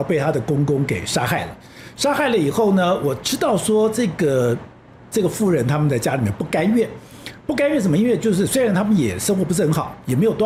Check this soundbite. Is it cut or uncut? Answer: uncut